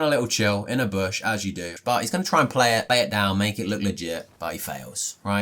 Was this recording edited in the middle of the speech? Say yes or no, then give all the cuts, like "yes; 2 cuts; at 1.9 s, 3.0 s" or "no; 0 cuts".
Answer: yes; 2 cuts; at 1.7 s, 2.8 s